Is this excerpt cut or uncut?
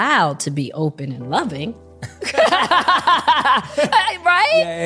uncut